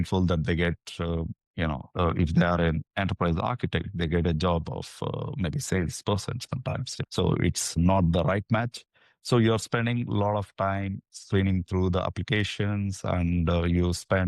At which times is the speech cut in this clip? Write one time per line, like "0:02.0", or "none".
none